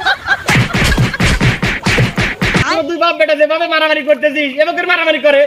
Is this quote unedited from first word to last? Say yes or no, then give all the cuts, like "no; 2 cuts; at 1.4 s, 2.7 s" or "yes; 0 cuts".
no; 1 cut; at 2.7 s